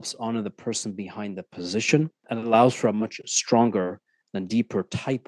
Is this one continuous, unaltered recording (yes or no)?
no